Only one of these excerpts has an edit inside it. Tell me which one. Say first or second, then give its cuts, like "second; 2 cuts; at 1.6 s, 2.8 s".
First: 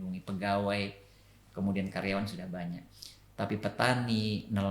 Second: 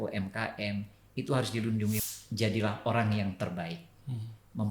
second; 1 cut; at 2.0 s